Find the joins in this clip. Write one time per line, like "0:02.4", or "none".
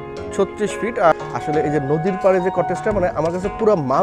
0:01.1